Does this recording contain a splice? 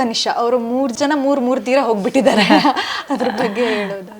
yes; 1 cut; at 0.9 s

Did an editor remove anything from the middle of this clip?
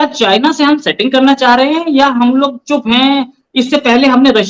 no; 0 cuts

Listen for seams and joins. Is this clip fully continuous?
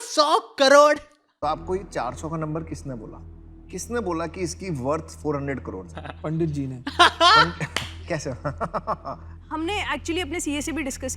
no; 1 cut; at 1.3 s

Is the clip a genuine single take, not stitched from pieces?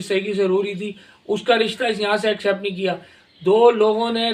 yes; 0 cuts

